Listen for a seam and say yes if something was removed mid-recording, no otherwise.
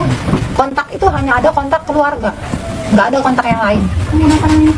no